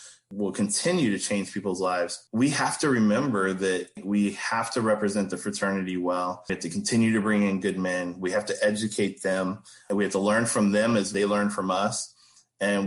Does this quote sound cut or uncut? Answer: cut